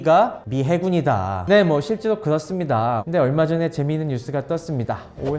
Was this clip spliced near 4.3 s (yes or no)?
no